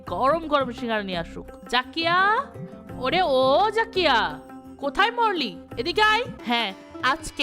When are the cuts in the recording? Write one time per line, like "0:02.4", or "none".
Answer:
0:06.4